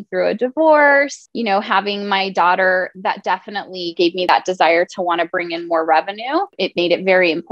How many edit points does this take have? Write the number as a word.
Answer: three